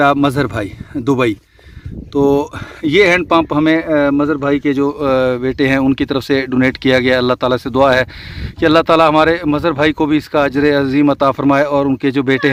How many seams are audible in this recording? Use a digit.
0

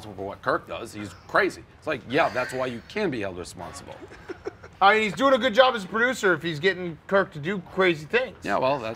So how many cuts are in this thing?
1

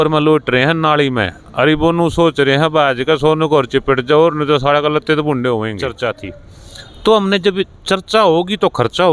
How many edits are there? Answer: 1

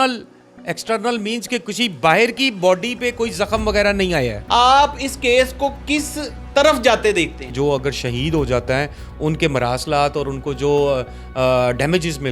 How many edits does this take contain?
2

